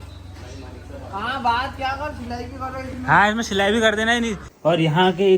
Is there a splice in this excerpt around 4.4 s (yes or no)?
yes